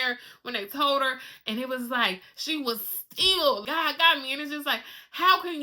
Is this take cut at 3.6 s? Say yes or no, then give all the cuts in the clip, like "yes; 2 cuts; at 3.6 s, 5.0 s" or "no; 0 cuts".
yes; 1 cut; at 3.6 s